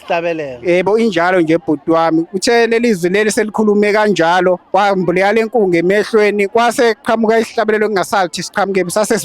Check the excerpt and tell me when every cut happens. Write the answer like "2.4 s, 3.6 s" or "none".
4.6 s